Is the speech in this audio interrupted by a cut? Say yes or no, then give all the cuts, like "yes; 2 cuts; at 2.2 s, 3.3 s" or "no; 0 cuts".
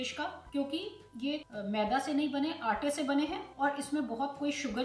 no; 0 cuts